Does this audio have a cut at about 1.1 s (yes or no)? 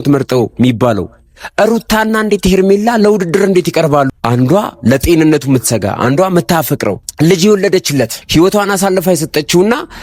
no